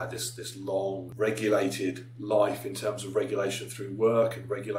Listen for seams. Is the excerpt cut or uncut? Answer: cut